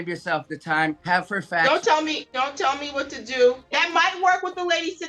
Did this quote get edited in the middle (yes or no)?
yes